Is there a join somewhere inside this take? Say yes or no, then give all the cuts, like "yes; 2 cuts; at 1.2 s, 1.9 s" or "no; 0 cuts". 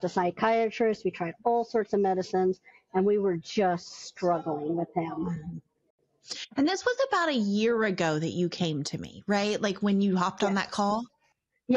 no; 0 cuts